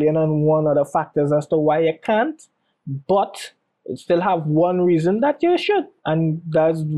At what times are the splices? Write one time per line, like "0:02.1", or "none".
0:06.0